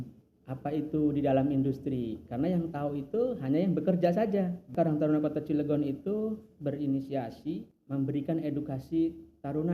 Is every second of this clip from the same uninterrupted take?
no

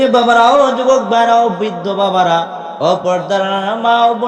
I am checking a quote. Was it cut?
yes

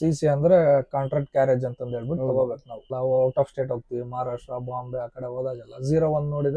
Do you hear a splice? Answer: yes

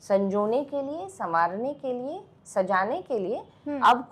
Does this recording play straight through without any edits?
yes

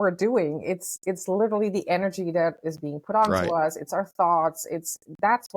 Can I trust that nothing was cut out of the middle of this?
yes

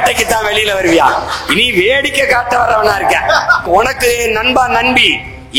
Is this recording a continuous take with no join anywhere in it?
no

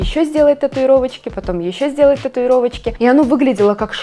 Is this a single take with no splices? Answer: no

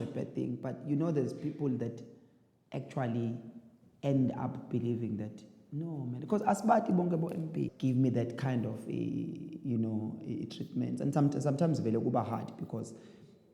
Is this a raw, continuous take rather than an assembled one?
no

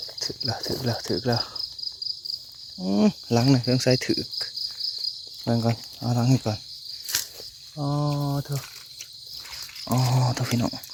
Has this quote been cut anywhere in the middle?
no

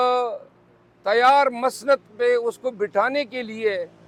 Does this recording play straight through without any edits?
yes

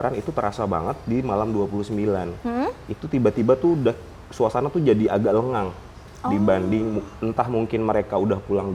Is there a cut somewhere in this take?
no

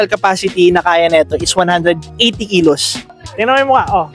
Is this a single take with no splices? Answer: no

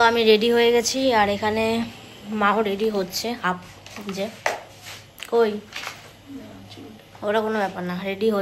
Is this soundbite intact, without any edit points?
yes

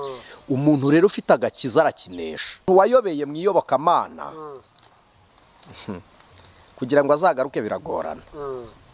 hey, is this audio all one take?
no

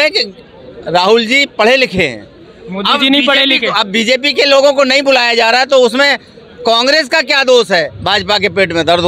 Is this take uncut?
no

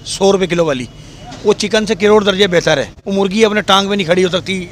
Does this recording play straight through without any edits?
no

